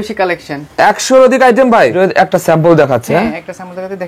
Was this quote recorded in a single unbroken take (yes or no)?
no